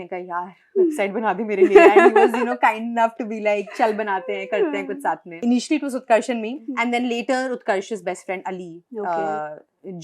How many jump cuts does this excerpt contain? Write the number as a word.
two